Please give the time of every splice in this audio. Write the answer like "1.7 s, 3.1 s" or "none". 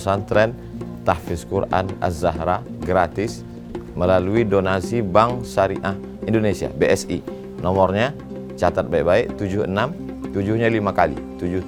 none